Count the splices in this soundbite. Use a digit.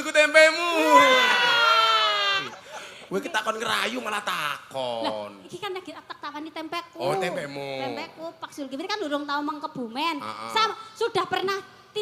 1